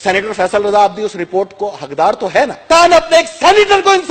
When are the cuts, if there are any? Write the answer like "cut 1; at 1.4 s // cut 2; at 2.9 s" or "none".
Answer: cut 1; at 2.6 s